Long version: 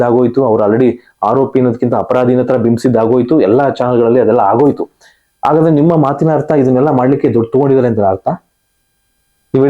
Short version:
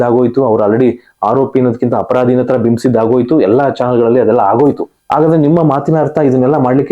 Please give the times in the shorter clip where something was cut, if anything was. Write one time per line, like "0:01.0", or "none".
0:04.9